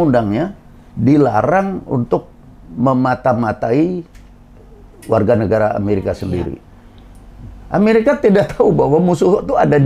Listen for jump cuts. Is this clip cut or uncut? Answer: uncut